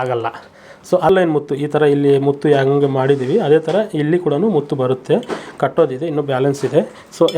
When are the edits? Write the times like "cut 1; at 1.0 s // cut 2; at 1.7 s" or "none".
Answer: cut 1; at 1.1 s